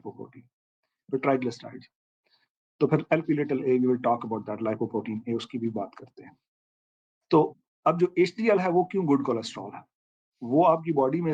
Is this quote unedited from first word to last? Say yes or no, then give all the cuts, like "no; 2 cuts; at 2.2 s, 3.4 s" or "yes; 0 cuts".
yes; 0 cuts